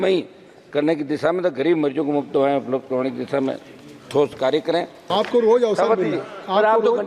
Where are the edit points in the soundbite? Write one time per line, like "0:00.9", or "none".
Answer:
0:05.1